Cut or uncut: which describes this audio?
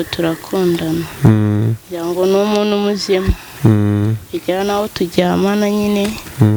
uncut